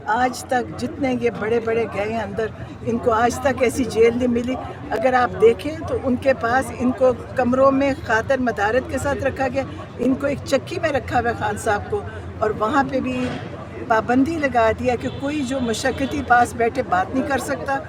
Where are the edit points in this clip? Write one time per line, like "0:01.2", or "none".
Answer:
none